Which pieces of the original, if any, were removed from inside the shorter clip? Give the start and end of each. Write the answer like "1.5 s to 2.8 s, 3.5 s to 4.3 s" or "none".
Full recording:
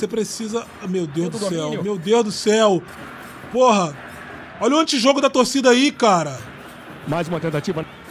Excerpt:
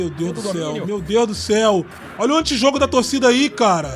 3.0 s to 4.4 s